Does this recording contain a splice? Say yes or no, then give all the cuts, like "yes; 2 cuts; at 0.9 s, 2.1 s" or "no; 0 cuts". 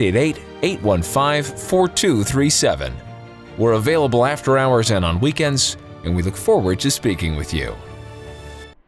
yes; 1 cut; at 7.8 s